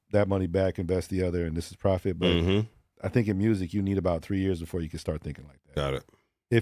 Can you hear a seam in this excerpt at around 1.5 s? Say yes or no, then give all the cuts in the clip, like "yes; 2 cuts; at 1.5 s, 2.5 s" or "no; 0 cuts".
no; 1 cut; at 2.9 s